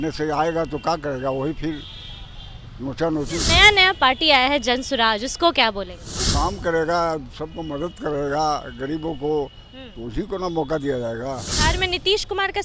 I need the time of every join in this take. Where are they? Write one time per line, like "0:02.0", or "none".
0:03.4
0:06.3
0:11.6